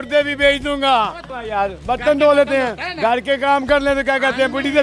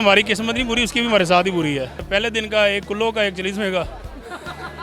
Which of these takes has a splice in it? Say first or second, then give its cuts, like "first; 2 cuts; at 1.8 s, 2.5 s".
second; 1 cut; at 2.1 s